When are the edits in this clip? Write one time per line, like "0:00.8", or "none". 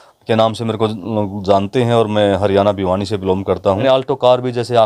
0:03.8